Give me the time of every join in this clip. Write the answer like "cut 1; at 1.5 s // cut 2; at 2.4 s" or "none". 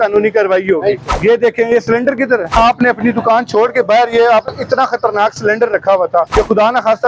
cut 1; at 1.1 s // cut 2; at 2.6 s // cut 3; at 6.3 s